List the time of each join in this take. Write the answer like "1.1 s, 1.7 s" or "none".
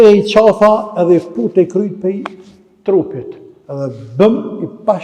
none